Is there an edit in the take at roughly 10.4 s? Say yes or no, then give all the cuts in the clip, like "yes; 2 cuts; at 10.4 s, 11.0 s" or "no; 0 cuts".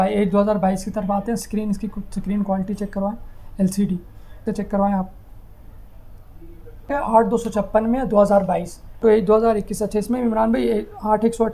no; 3 cuts; at 4.4 s, 6.9 s, 9.0 s